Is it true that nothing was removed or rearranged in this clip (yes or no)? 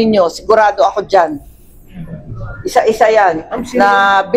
no